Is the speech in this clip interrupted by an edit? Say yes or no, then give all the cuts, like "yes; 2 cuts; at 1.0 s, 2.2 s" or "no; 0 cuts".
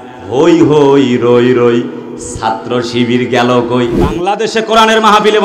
yes; 1 cut; at 4.0 s